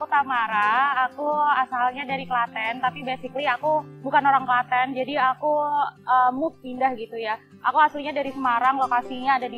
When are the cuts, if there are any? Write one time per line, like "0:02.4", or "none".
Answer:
none

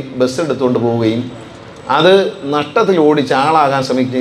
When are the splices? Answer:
none

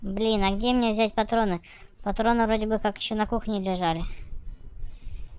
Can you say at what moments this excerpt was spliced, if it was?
none

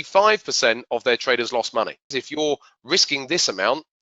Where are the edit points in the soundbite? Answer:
0:02.1

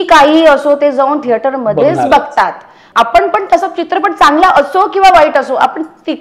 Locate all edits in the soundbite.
0:02.8

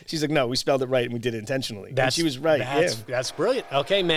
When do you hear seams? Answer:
none

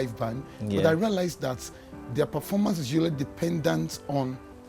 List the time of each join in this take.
none

